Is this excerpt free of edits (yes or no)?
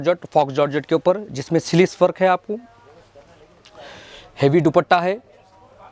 yes